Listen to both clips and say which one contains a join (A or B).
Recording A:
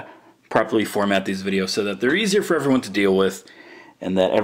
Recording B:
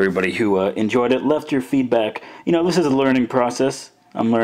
A